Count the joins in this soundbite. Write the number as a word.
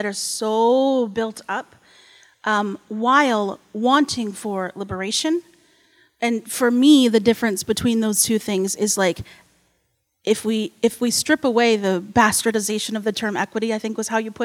zero